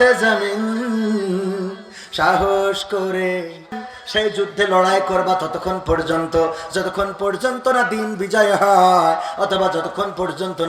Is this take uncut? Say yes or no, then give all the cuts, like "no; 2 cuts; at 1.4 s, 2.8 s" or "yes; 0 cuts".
no; 1 cut; at 3.9 s